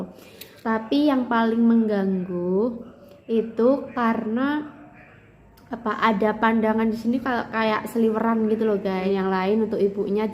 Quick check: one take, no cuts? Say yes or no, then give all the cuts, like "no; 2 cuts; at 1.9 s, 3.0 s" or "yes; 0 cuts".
no; 1 cut; at 9.1 s